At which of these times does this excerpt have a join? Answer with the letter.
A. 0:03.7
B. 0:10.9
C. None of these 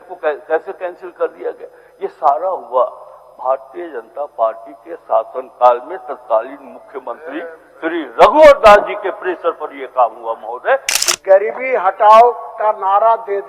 B